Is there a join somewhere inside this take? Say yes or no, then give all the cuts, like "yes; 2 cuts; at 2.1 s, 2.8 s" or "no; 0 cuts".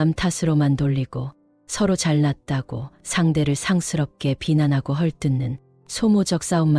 no; 0 cuts